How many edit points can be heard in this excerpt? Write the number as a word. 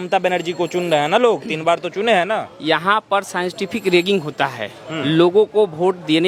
zero